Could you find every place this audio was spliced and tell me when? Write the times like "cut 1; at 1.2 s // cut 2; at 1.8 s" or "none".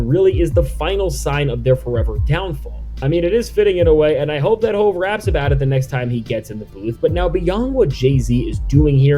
none